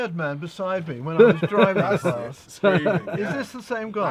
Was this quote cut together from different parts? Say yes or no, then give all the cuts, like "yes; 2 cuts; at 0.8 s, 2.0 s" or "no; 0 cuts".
no; 0 cuts